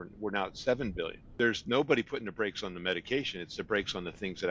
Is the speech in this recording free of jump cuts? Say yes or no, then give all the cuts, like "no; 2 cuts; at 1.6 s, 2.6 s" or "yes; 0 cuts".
no; 1 cut; at 1.2 s